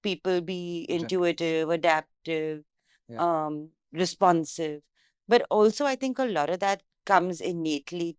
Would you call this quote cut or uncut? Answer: uncut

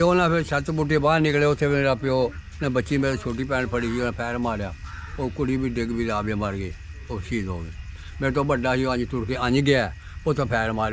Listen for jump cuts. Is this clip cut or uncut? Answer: uncut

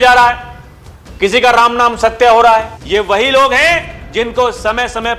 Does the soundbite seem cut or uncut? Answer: cut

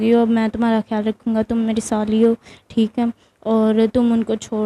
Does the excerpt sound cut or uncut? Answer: uncut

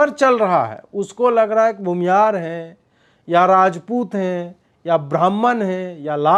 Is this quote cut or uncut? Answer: uncut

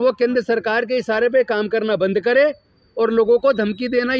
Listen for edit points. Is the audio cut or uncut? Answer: uncut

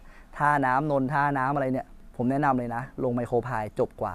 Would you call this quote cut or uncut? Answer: uncut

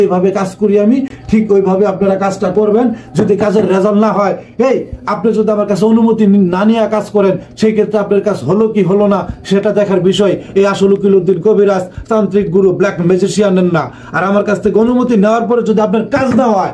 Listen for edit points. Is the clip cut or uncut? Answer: uncut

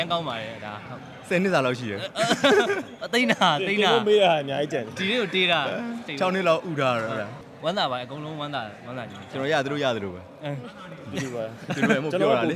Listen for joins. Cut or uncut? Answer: uncut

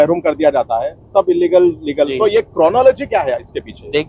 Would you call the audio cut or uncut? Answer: uncut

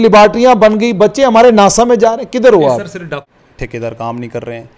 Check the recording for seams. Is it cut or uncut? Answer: cut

